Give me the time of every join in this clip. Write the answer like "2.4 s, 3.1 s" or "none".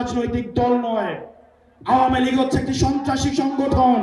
none